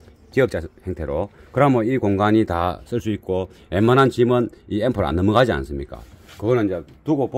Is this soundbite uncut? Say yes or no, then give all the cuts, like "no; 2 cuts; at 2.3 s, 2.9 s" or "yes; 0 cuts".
yes; 0 cuts